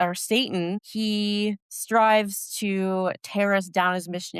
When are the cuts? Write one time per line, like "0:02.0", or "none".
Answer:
0:00.9
0:01.7